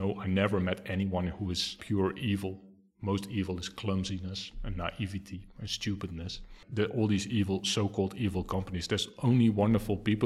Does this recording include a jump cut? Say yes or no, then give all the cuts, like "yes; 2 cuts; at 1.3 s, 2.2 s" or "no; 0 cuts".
yes; 2 cuts; at 1.8 s, 6.6 s